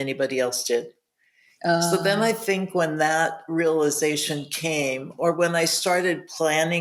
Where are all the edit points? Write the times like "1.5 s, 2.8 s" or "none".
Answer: none

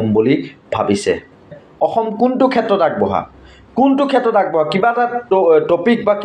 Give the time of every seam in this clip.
1.6 s

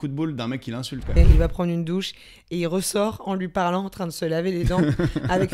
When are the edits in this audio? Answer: 1.2 s

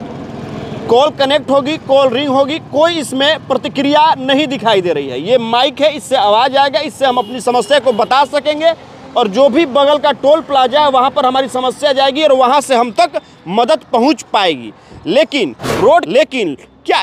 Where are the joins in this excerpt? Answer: 16.1 s

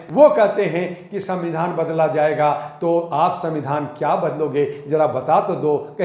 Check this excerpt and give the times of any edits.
none

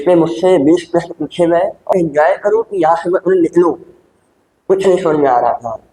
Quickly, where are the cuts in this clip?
1.9 s

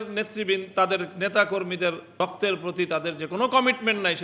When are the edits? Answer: 2.1 s

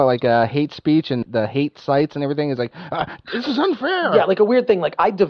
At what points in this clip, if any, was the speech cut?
4.1 s

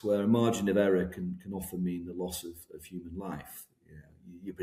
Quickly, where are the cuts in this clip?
none

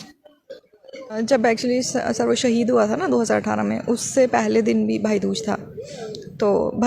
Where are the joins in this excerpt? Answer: 1.1 s

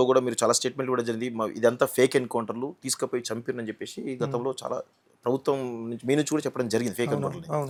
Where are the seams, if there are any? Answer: none

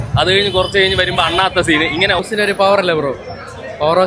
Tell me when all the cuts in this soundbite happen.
2.2 s

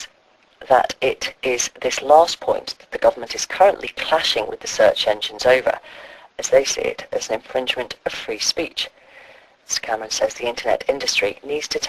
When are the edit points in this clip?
none

